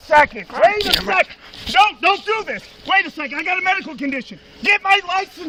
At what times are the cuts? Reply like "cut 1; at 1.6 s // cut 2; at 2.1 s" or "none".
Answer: none